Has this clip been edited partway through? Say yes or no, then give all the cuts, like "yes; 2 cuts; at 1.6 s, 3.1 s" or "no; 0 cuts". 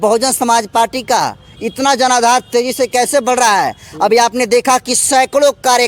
no; 0 cuts